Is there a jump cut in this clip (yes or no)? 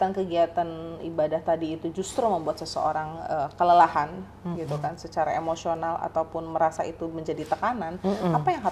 no